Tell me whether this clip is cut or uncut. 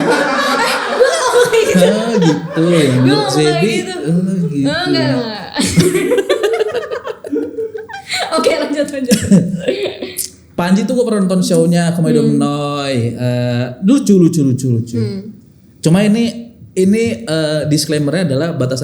uncut